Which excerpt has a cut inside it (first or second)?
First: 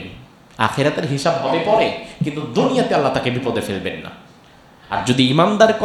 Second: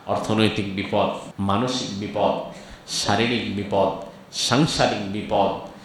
second